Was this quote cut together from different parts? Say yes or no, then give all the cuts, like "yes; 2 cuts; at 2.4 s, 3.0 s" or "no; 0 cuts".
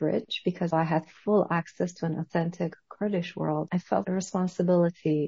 yes; 2 cuts; at 0.7 s, 4.0 s